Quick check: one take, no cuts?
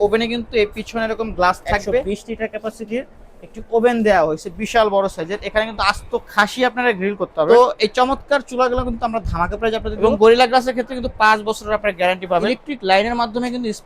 no; 4 cuts; at 2.0 s, 7.5 s, 9.9 s, 12.4 s

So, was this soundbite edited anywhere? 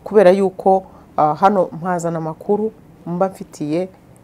no; 0 cuts

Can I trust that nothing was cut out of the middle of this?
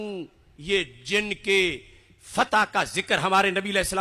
yes; 0 cuts

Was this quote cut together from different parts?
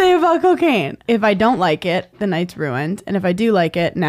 yes; 1 cut; at 1.0 s

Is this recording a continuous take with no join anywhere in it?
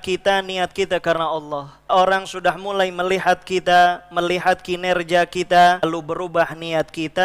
no; 2 cuts; at 1.9 s, 5.8 s

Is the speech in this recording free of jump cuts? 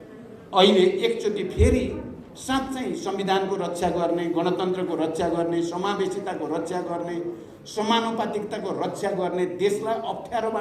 yes; 0 cuts

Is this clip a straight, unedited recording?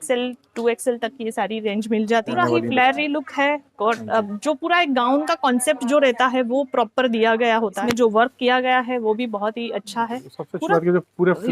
no; 2 cuts; at 2.4 s, 7.8 s

